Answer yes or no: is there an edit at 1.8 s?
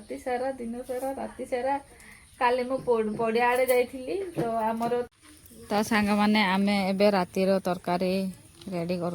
no